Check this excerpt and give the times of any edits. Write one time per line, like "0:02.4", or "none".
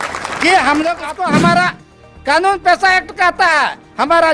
0:01.1